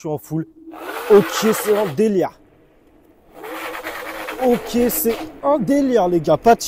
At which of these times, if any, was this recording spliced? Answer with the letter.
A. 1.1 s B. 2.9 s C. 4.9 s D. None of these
D